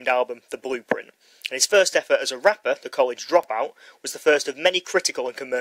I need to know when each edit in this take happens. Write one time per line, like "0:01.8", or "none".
0:04.4